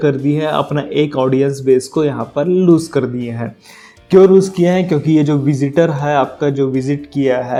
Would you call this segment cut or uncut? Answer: uncut